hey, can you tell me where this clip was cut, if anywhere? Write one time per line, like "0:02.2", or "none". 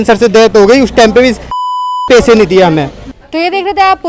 none